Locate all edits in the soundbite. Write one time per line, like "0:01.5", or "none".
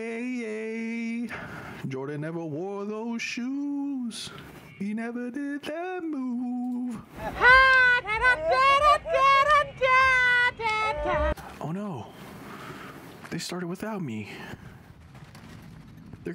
0:11.3

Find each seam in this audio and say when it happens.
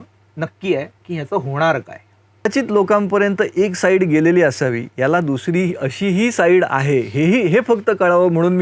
0:02.5

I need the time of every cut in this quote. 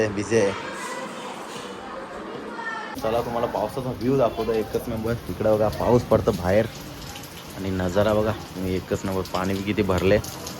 0:02.9

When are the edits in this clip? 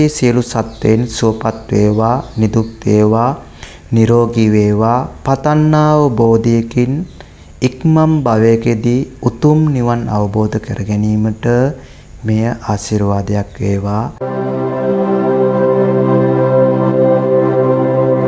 0:14.1

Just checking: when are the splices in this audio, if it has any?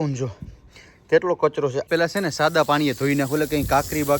0:01.9

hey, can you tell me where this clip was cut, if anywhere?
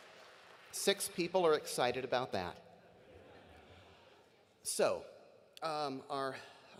none

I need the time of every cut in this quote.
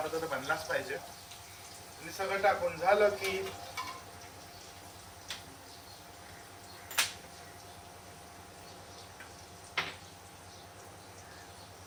none

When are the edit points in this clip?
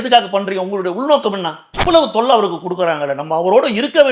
0:01.7

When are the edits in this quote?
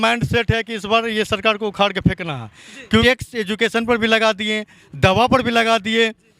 0:03.0

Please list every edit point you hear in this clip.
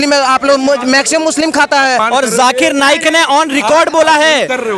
0:02.0

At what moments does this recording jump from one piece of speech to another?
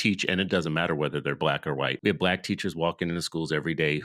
0:02.0

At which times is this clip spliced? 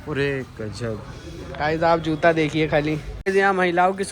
0:03.1

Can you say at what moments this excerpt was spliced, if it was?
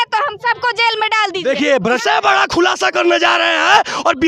0:02.0

